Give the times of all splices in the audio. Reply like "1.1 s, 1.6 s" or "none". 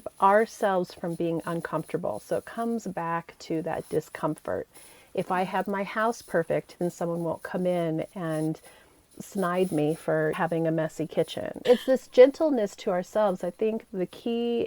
11.5 s